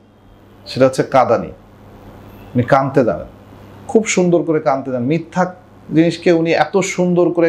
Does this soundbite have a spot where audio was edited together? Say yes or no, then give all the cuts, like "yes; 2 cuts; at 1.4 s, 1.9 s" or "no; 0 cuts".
no; 0 cuts